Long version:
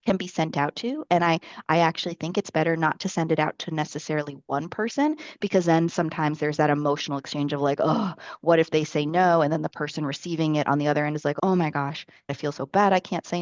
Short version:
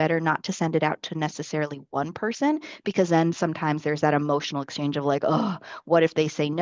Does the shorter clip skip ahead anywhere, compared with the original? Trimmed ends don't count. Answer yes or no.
no